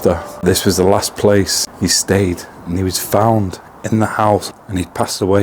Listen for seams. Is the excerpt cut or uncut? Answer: cut